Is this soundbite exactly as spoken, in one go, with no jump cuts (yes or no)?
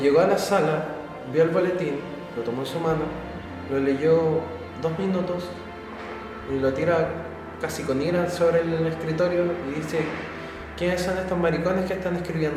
yes